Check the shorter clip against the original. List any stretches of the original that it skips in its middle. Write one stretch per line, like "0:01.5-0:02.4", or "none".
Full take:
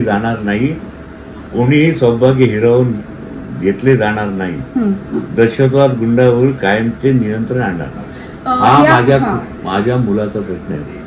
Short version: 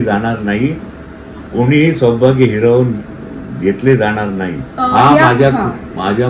0:04.6-0:08.3